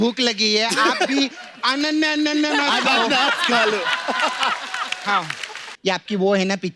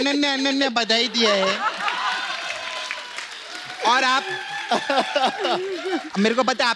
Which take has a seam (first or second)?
first